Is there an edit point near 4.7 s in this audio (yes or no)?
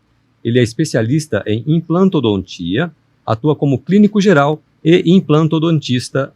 yes